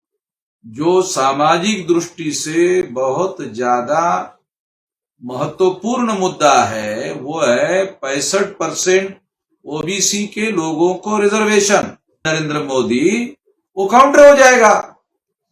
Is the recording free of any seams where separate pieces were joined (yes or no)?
no